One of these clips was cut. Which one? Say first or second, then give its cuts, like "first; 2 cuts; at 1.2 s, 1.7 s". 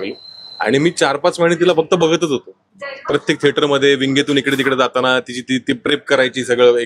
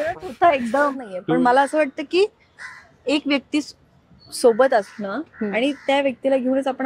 second; 1 cut; at 1.1 s